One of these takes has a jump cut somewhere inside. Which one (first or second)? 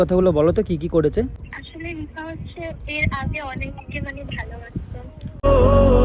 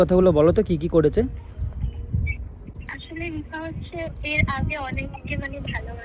first